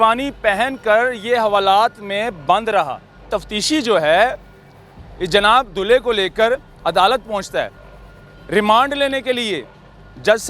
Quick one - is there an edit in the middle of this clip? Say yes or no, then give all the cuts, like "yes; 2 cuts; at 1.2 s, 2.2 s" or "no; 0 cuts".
yes; 1 cut; at 3.3 s